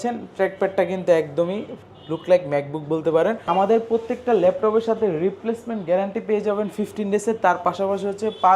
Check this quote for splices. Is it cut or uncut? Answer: cut